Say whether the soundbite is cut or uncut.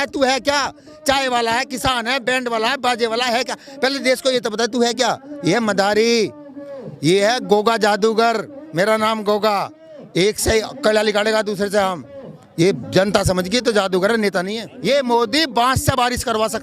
cut